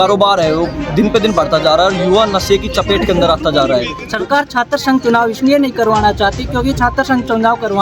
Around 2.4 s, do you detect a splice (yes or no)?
no